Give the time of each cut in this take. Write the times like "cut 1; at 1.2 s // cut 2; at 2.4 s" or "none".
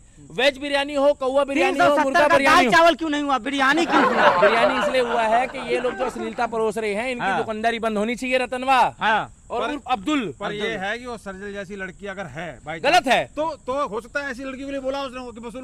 none